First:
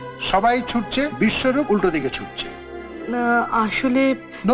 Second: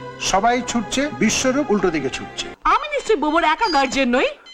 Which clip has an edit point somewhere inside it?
second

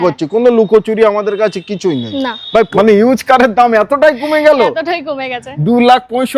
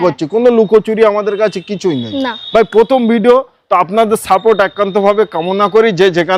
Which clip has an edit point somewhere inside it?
first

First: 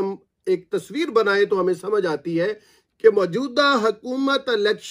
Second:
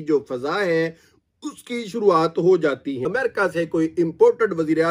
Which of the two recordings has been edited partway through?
second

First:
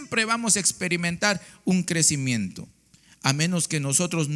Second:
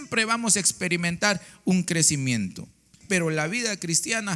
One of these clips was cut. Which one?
second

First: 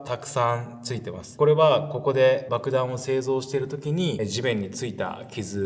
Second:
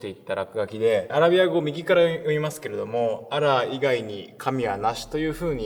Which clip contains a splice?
first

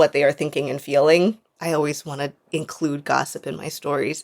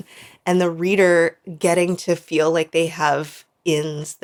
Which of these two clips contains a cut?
first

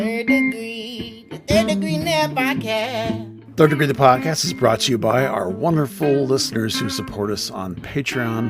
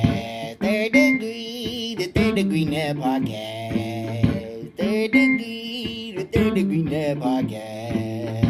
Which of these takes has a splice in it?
first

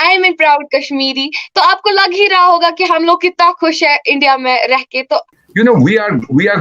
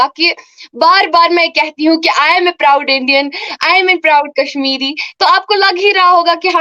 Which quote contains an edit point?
first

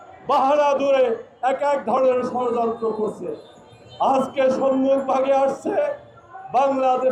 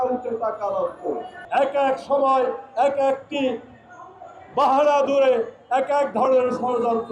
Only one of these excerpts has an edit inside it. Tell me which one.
second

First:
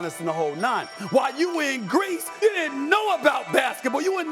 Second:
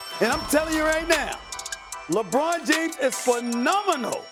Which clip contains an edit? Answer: first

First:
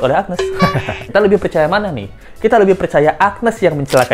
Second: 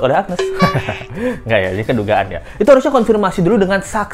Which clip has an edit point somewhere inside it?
first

